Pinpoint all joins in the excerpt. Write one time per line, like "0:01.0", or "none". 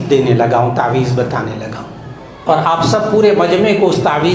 0:02.4